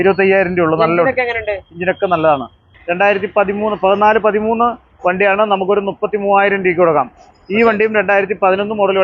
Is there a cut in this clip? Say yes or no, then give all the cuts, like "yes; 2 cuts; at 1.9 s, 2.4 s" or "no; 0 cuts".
yes; 1 cut; at 2.7 s